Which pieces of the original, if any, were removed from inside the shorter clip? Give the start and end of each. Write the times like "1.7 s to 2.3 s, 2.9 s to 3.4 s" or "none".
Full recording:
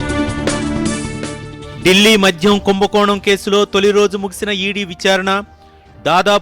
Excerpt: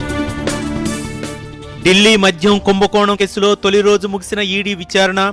3.2 s to 3.3 s

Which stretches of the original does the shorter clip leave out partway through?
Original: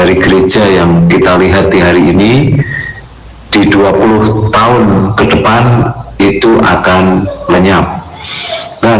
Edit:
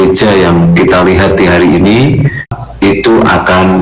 2.9 s to 6.0 s

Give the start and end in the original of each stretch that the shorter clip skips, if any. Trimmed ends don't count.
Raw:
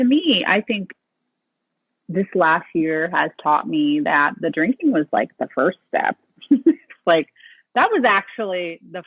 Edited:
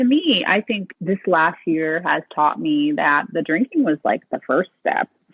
0.9 s to 2.0 s

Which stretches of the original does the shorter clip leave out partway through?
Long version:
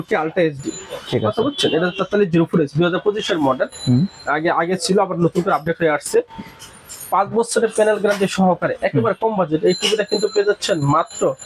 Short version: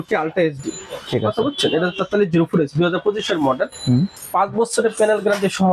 4.2 s to 7.0 s

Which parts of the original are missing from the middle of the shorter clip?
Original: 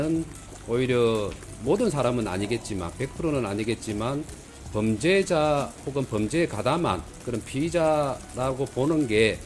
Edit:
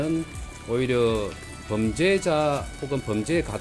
1.4 s to 4.5 s

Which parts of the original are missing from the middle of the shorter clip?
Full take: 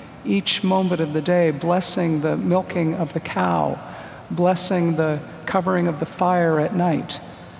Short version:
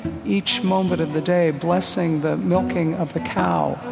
none

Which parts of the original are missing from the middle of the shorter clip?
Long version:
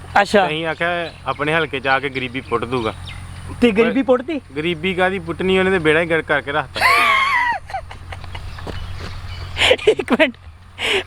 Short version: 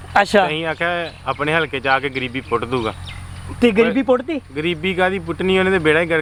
none

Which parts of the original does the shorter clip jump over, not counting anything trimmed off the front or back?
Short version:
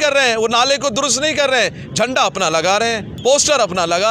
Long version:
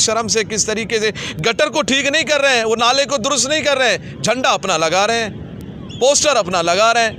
5.4 s to 5.9 s

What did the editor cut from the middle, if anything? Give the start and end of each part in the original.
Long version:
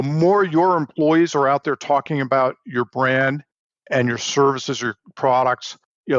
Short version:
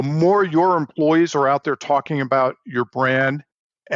none

